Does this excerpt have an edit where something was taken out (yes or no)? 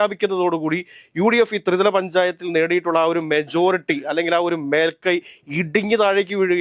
no